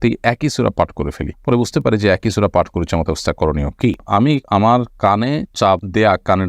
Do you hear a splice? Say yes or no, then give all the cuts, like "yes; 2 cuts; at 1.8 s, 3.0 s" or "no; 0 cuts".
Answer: yes; 1 cut; at 4.1 s